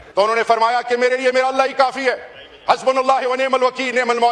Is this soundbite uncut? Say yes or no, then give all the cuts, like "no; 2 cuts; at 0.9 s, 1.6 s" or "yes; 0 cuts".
yes; 0 cuts